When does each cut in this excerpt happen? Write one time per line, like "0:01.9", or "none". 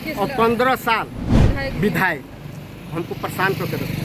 0:01.3